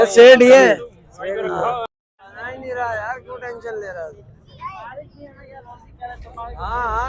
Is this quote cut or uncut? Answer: cut